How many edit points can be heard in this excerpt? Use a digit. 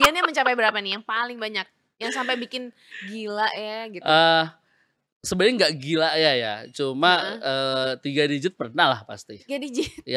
0